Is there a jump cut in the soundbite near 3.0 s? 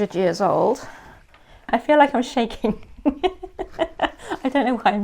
no; 1 cut; at 1.5 s

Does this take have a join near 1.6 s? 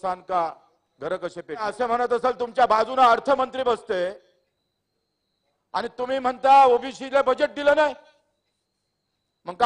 yes; 1 cut; at 1.6 s

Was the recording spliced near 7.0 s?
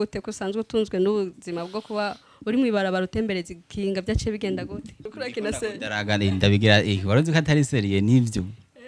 no; 1 cut; at 5.1 s

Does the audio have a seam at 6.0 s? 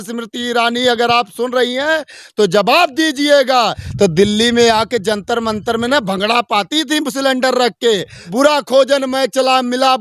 no; 2 cuts; at 3.8 s, 8.3 s

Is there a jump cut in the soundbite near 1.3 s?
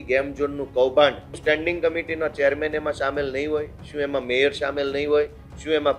yes; 1 cut; at 1.3 s

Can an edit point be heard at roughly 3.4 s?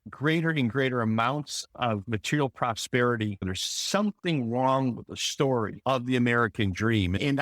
yes; 1 cut; at 3.4 s

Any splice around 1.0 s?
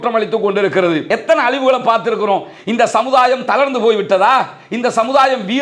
yes; 1 cut; at 1.0 s

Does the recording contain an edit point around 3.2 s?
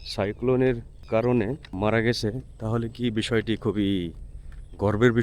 no; 2 cuts; at 1.0 s, 1.7 s

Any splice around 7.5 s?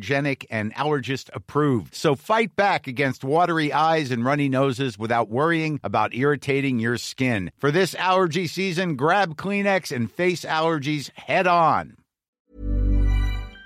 no; 1 cut; at 12.5 s

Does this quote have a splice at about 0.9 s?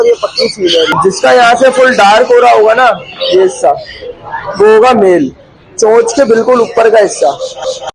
yes; 1 cut; at 0.9 s

